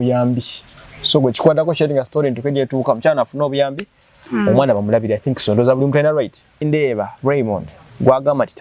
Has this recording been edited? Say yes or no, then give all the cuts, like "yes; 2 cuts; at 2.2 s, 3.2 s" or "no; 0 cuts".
yes; 1 cut; at 6.6 s